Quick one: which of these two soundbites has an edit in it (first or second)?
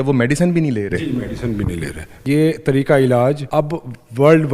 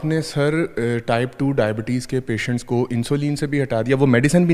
first